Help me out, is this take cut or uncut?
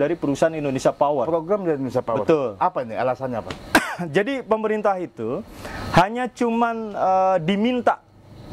uncut